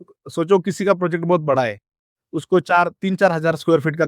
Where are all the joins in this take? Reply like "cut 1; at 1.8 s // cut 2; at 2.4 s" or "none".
none